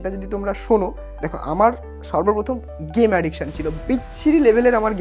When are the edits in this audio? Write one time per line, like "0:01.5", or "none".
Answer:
0:01.1